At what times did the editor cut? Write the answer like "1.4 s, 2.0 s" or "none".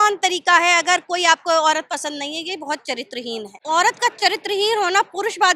3.5 s